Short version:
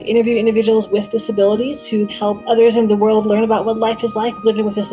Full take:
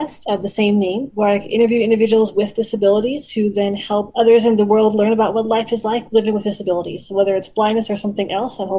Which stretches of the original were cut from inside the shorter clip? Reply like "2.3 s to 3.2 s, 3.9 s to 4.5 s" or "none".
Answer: 3.5 s to 3.8 s